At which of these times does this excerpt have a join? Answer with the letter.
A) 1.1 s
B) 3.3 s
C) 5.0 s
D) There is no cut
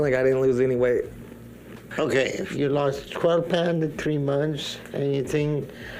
D